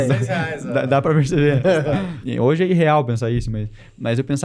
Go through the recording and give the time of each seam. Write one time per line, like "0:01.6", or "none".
0:02.1